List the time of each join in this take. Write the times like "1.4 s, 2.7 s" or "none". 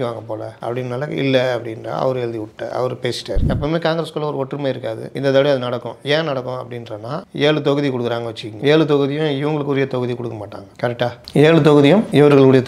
3.4 s